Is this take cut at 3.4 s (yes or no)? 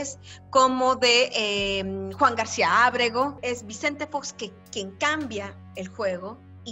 yes